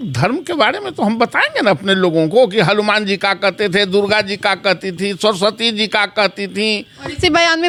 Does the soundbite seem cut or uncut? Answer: uncut